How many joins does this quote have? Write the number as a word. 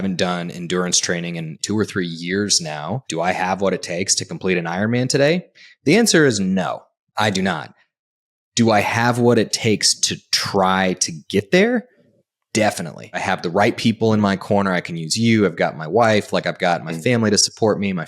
three